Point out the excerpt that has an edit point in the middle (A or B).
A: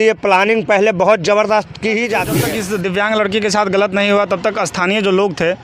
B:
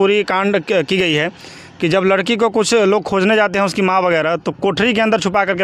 A